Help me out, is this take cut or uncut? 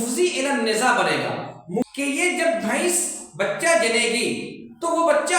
cut